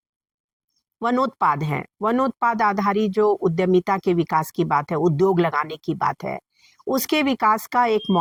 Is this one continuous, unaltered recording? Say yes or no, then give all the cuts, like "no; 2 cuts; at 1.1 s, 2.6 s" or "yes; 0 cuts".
yes; 0 cuts